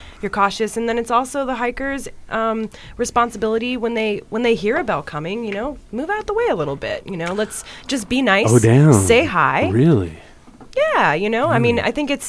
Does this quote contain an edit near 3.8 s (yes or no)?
no